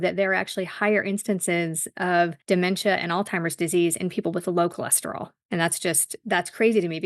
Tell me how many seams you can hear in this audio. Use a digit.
2